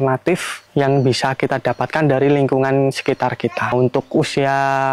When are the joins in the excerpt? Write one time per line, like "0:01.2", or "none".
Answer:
0:03.7